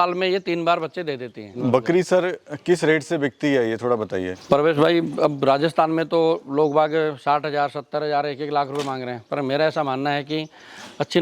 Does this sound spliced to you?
no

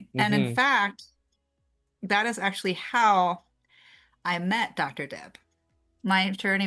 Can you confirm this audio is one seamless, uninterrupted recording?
yes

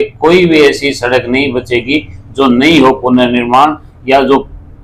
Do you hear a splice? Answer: no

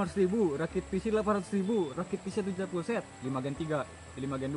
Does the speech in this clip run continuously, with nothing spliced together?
no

